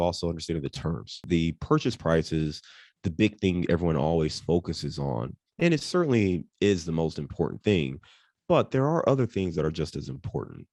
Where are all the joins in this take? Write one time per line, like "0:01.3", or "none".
0:01.2